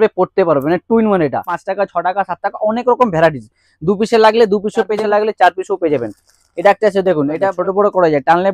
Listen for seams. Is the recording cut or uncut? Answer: cut